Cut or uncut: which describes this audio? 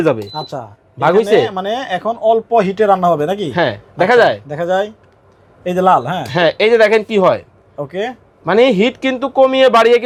uncut